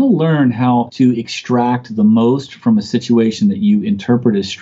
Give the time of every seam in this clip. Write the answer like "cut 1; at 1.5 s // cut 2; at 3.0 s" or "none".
cut 1; at 0.9 s